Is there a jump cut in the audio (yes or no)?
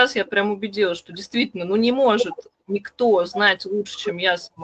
no